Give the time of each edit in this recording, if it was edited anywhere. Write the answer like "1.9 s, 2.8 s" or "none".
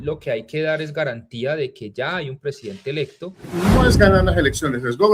3.5 s